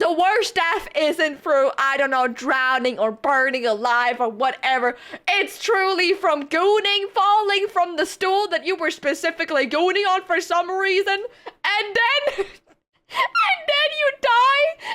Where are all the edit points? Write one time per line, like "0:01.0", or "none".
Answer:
none